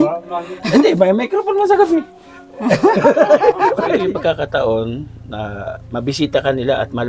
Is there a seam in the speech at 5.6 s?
no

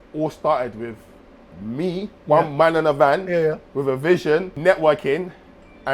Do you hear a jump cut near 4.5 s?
yes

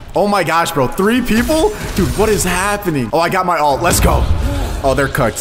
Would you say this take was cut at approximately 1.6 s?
no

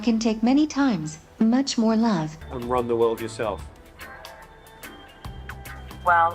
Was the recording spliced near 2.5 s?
yes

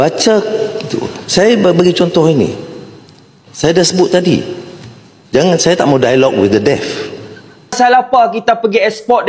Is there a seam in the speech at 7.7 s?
yes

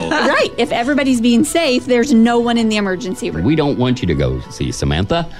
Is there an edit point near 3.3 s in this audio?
yes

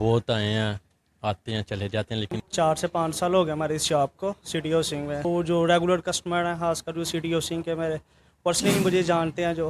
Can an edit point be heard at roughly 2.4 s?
yes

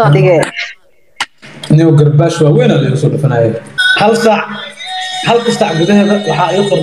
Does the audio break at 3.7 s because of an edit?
yes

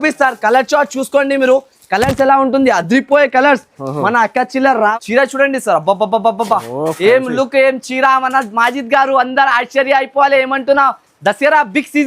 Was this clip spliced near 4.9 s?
yes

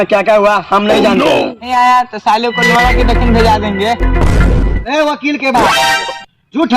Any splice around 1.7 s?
yes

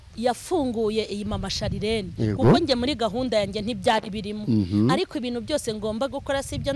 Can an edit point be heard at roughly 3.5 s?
no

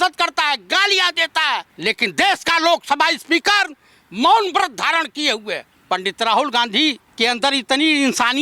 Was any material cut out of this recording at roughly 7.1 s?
yes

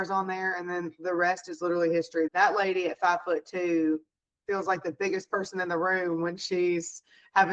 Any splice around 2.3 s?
yes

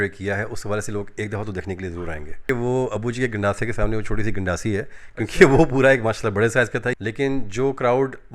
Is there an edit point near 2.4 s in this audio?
yes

